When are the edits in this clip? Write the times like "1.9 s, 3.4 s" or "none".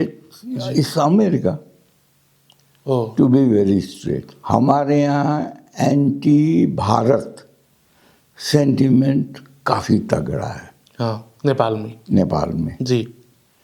4.3 s